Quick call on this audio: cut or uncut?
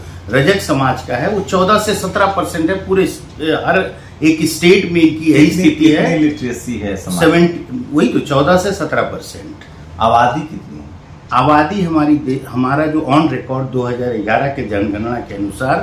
uncut